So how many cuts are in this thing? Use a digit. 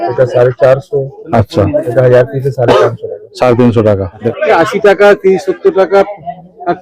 1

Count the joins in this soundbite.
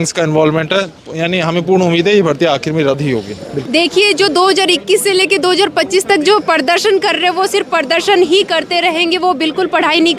1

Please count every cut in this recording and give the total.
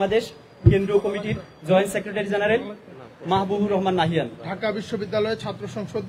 1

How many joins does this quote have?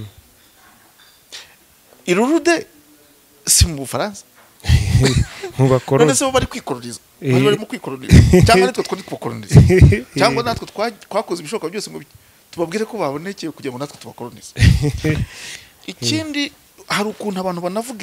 0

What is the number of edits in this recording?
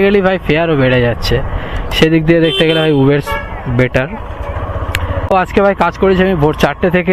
1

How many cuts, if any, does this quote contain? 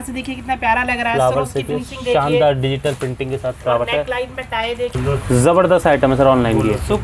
1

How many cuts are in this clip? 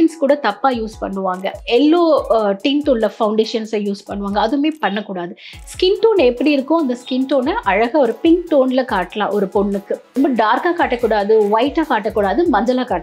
1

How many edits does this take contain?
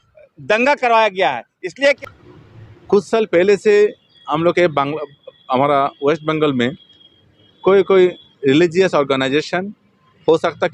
1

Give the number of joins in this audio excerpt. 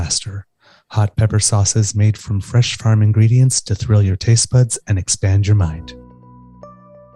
1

